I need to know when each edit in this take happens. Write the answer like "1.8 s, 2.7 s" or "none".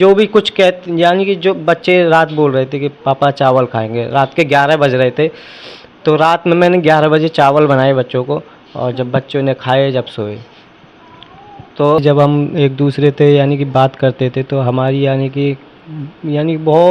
12.0 s